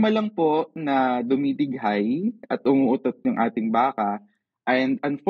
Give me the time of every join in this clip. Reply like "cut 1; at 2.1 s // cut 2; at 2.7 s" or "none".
none